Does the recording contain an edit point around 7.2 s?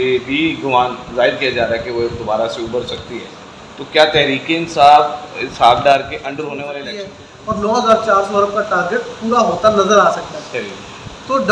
yes; 1 cut; at 7.2 s

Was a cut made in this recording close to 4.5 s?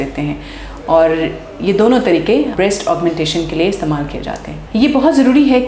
yes; 1 cut; at 4.5 s

